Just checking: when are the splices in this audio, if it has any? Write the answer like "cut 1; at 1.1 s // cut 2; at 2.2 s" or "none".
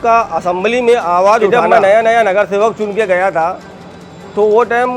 cut 1; at 1.5 s